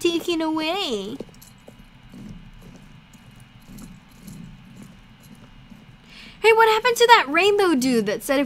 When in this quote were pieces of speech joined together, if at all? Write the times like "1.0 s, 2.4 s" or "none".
none